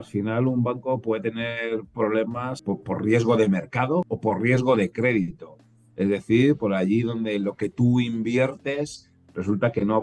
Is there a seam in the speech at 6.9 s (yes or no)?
no